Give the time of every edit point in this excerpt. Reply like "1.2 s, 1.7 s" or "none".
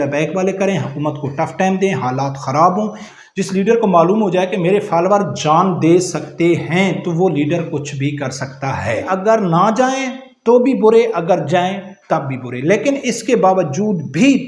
3.0 s, 9.0 s